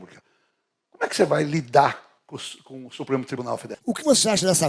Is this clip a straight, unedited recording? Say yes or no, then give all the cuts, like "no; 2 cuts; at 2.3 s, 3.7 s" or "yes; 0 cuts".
no; 1 cut; at 3.7 s